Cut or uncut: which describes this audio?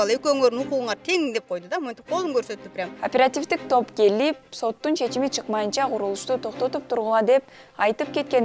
cut